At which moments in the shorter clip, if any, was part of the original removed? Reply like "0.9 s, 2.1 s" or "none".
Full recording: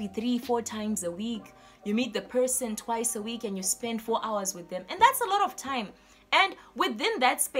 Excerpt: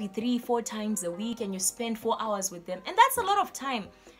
1.3 s